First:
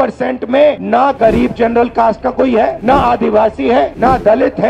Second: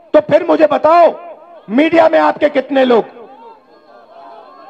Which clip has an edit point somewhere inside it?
first; 3 cuts; at 0.8 s, 2.8 s, 3.9 s

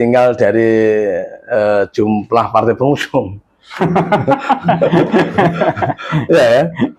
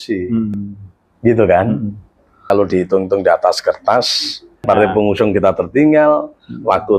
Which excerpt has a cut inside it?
second; 2 cuts; at 2.5 s, 4.6 s

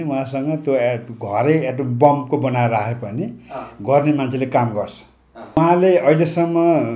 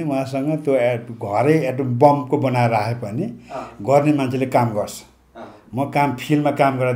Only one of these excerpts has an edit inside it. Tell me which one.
first; 1 cut; at 5.6 s

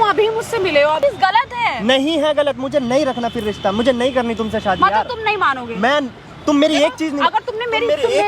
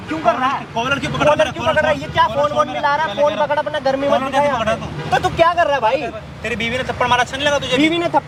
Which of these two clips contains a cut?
first; 1 cut; at 1.0 s

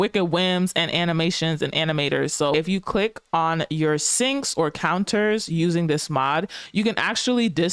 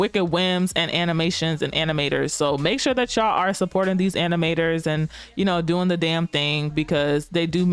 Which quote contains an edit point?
first; 1 cut; at 2.5 s

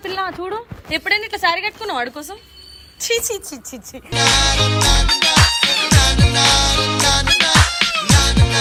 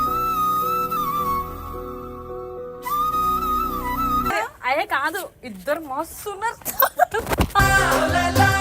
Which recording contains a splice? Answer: second; 1 cut; at 4.3 s

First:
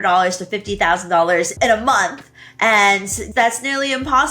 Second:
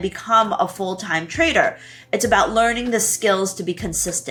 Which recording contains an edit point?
first; 2 cuts; at 1.5 s, 3.2 s

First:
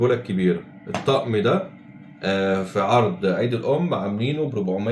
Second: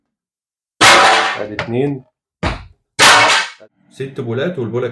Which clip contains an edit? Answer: second; 1 cut; at 3.5 s

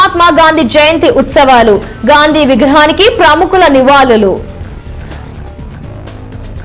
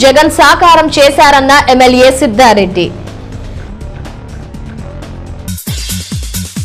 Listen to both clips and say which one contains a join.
first; 1 cut; at 4.5 s

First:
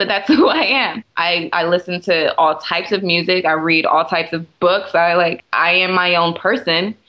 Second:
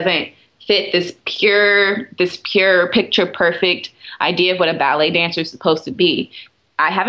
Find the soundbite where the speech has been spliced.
first; 2 cuts; at 1.0 s, 5.4 s

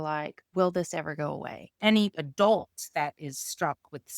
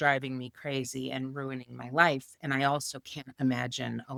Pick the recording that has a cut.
first; 1 cut; at 1.8 s

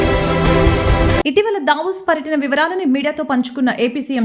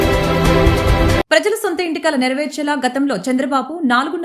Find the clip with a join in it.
second; 1 cut; at 0.9 s

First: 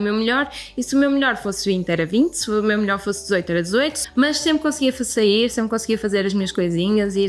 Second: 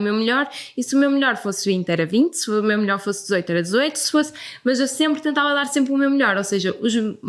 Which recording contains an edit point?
first; 1 cut; at 4.0 s

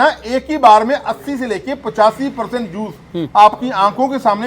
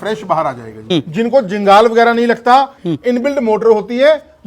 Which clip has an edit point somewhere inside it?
second; 2 cuts; at 0.9 s, 2.8 s

